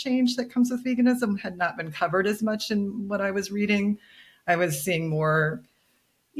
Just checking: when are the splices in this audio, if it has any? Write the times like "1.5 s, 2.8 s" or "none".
none

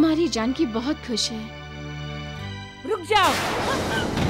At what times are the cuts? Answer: 2.4 s

